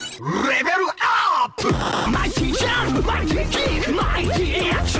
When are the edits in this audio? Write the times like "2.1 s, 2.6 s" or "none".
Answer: 1.8 s